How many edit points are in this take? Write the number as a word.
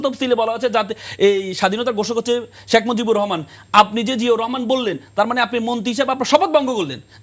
zero